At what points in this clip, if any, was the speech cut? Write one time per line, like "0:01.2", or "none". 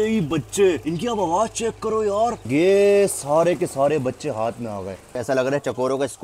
0:02.4
0:05.2